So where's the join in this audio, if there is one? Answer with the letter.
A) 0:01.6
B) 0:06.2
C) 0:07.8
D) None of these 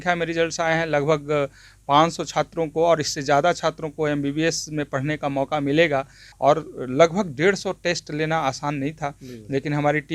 B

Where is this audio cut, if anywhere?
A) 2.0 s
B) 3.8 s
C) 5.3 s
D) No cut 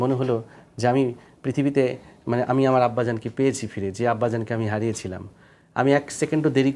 D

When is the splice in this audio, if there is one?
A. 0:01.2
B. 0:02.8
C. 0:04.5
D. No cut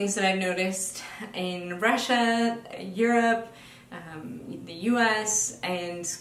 B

